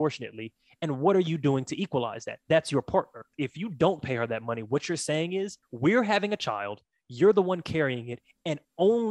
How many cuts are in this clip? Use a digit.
2